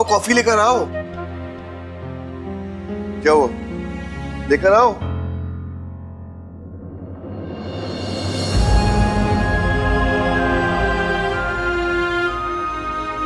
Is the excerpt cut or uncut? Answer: uncut